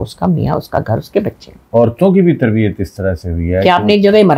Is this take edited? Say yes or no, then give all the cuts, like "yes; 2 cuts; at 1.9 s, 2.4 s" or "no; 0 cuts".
yes; 1 cut; at 1.6 s